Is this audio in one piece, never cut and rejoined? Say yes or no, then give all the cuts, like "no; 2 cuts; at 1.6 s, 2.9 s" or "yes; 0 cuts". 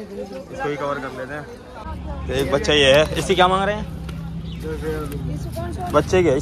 no; 1 cut; at 1.9 s